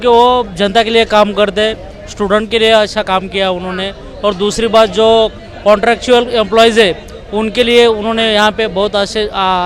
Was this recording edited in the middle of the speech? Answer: no; 0 cuts

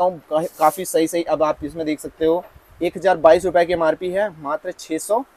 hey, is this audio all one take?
yes; 0 cuts

